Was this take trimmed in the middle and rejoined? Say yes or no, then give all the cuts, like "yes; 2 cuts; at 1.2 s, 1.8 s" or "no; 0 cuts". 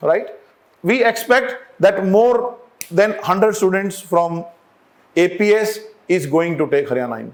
no; 0 cuts